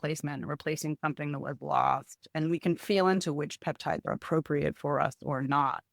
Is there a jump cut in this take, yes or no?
no